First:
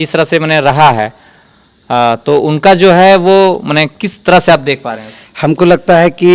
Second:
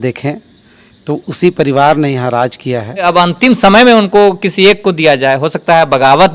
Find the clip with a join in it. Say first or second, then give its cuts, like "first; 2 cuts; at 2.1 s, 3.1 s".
second; 1 cut; at 3.0 s